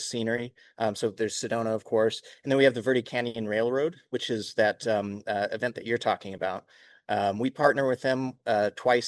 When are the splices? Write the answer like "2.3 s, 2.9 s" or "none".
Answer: none